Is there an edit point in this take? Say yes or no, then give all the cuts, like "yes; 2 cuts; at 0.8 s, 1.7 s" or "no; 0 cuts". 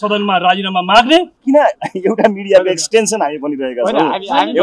yes; 1 cut; at 1.3 s